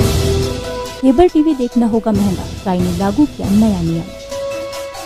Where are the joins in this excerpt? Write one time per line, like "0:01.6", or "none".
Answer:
0:00.9